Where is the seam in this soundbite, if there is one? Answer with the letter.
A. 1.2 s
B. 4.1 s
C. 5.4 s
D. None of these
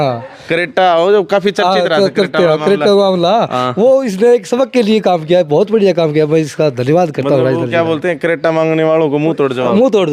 D